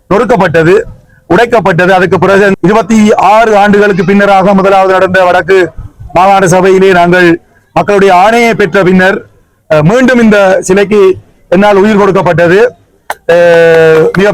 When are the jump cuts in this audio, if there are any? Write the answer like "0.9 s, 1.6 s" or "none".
2.5 s